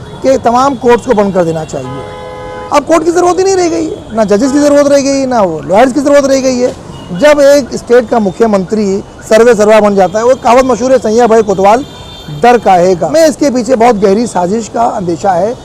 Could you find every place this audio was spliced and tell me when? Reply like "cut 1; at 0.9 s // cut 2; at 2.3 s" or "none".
cut 1; at 13.1 s